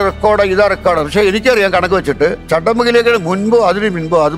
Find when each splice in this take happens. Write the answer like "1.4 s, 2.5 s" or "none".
2.4 s